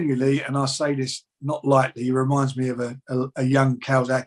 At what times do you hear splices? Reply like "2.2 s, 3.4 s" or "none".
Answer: none